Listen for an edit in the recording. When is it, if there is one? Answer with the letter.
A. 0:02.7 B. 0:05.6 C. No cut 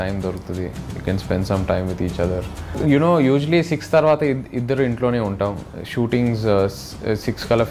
A